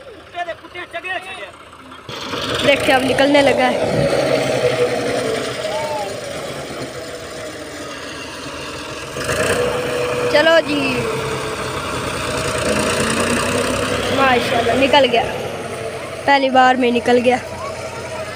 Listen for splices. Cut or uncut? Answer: uncut